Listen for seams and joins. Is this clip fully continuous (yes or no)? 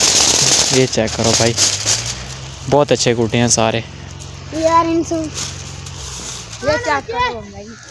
yes